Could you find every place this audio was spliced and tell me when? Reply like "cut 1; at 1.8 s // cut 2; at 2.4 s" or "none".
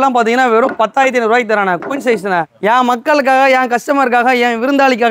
none